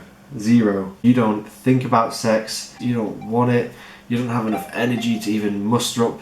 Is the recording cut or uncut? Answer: cut